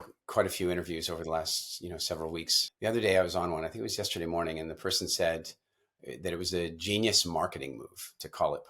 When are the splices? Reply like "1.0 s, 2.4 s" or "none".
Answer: 2.6 s